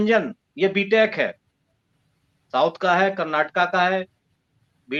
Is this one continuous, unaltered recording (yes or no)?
yes